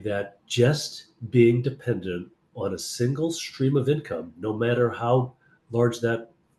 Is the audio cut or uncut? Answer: uncut